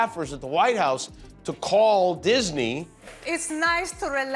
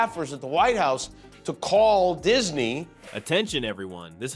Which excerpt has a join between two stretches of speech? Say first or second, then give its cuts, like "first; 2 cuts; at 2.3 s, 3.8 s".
first; 1 cut; at 3.1 s